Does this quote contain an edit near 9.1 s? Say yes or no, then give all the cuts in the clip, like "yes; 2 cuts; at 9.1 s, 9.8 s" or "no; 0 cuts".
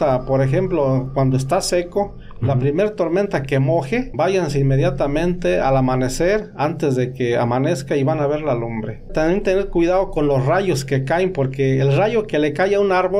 yes; 2 cuts; at 4.1 s, 9.1 s